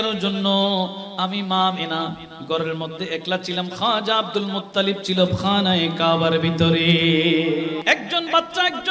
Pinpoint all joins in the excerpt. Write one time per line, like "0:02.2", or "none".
0:07.8